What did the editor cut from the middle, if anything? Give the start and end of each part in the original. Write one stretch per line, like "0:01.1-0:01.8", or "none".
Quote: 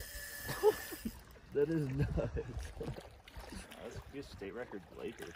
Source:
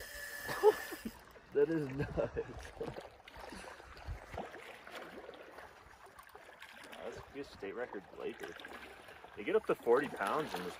0:03.7-0:06.9